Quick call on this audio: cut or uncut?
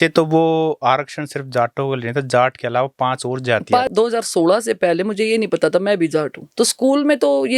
cut